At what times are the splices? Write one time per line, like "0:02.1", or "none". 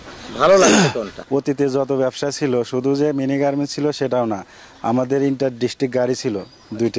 0:01.1